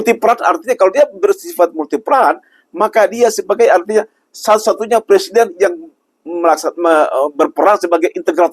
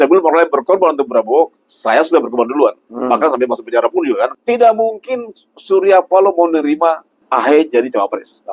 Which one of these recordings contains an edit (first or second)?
second